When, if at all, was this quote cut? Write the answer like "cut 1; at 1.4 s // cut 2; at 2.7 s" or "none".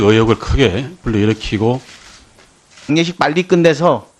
none